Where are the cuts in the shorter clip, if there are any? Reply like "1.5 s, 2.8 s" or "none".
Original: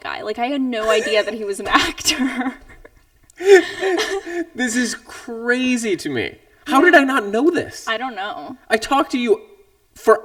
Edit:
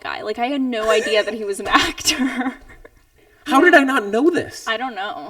3.2 s